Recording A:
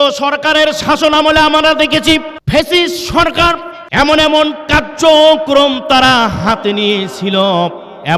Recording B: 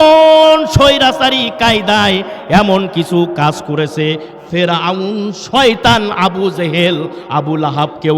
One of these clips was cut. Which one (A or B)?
A